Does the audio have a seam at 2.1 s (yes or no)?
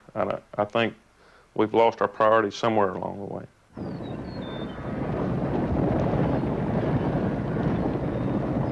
yes